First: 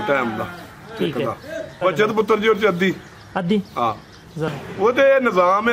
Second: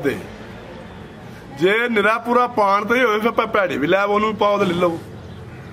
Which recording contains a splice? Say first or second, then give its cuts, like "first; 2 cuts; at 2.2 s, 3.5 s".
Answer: first; 2 cuts; at 1.8 s, 4.5 s